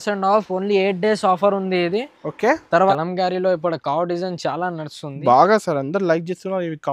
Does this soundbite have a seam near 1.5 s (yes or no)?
no